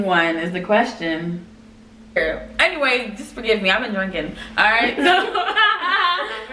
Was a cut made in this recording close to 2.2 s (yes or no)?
yes